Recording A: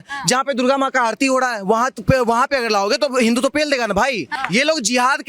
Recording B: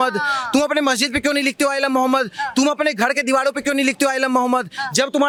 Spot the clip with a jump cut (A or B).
A